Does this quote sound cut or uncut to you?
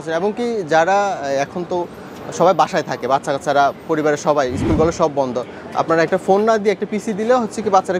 uncut